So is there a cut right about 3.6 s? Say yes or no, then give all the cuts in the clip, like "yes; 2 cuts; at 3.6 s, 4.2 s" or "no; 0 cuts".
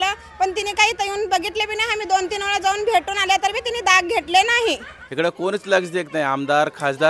no; 1 cut; at 5.0 s